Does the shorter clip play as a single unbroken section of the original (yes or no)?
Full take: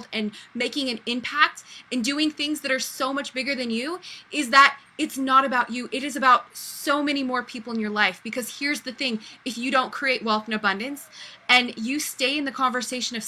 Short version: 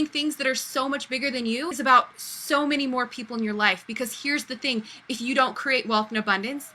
no